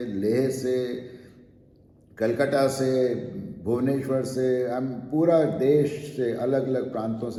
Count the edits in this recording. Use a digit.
0